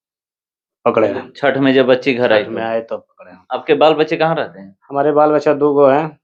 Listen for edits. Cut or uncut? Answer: uncut